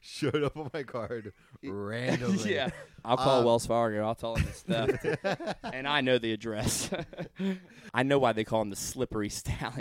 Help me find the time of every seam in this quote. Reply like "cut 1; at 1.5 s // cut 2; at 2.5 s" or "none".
cut 1; at 2.9 s // cut 2; at 7.9 s